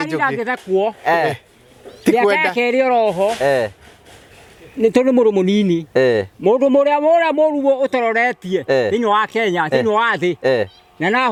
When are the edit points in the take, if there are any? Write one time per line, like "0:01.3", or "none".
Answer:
none